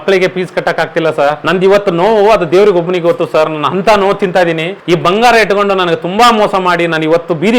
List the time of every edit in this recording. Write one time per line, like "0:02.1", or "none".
0:01.4
0:04.7